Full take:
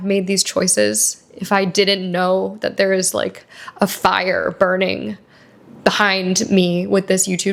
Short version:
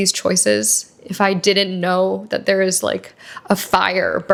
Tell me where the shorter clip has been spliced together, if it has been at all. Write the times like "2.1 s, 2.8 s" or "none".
none

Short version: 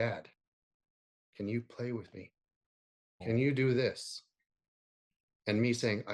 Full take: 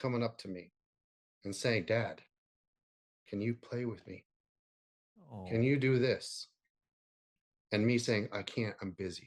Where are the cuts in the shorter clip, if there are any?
3.2 s

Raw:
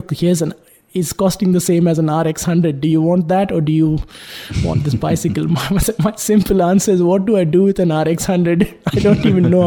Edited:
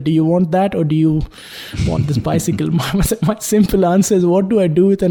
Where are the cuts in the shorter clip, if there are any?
none

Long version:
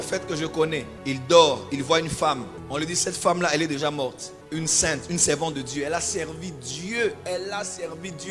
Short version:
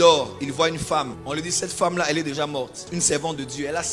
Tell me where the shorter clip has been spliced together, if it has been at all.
1.2 s, 2.9 s

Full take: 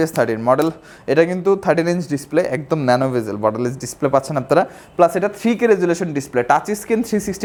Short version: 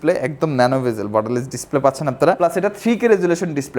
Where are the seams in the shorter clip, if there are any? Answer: 2.4 s

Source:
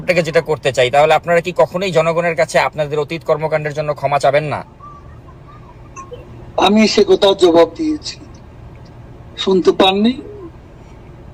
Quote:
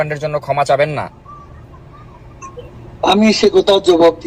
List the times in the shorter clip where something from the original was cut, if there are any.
none

